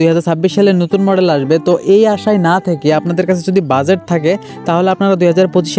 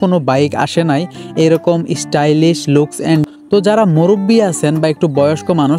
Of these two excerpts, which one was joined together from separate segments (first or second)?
second